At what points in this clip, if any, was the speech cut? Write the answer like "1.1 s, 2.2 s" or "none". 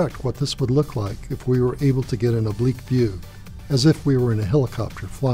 none